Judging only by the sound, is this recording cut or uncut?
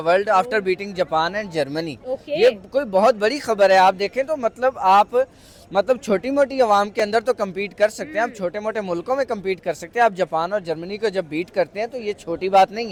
uncut